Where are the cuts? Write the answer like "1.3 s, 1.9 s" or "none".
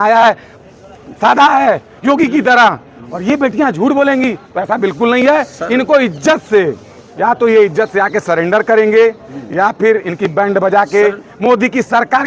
none